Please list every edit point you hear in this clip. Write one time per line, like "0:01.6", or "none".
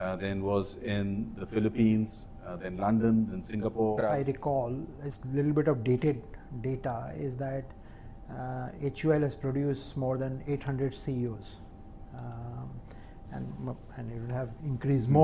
0:04.0

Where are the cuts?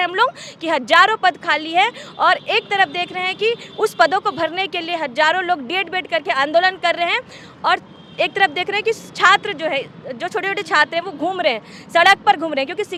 none

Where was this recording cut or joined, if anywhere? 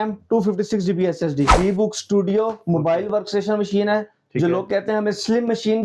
0:01.5

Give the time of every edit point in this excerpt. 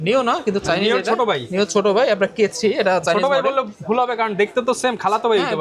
none

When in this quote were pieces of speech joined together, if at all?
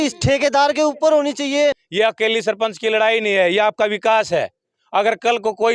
0:01.8

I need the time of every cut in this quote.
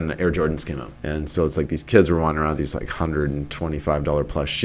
0:01.1

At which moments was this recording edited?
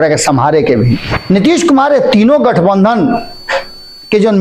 0:01.1

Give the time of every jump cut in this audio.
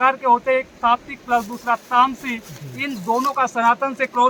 none

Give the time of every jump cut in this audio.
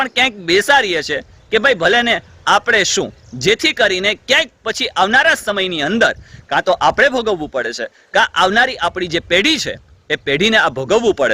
none

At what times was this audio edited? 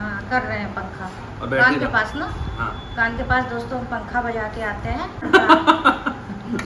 0:05.3

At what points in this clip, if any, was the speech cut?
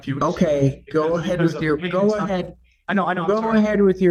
none

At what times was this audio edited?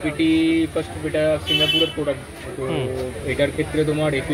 none

